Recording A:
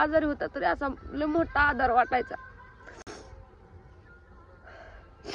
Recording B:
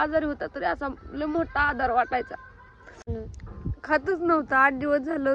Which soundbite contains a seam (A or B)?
B